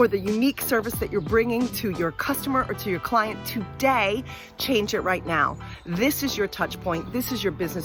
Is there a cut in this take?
no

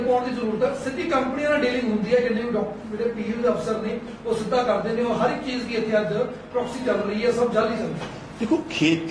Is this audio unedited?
yes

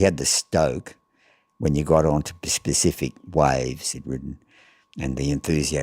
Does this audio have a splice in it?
yes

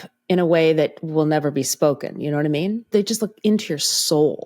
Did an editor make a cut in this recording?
yes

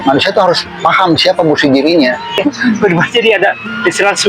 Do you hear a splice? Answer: yes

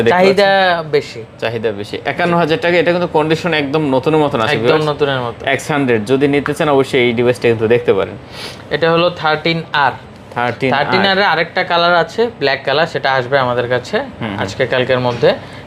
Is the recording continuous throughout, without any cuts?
yes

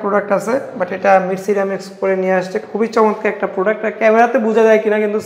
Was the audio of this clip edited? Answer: no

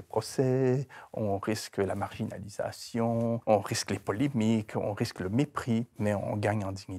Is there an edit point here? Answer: yes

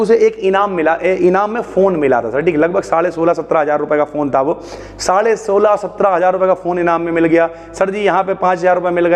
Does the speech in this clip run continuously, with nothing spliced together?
yes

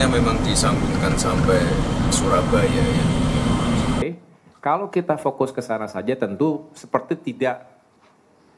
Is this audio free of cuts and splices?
no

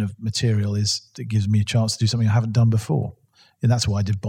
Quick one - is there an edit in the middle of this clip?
yes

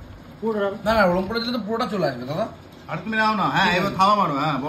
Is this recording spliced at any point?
no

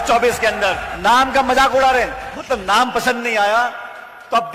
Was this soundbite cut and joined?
yes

